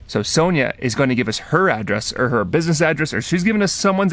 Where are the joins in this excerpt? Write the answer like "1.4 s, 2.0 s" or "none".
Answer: none